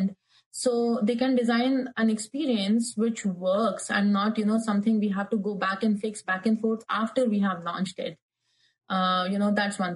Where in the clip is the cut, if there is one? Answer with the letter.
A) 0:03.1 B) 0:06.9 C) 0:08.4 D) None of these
D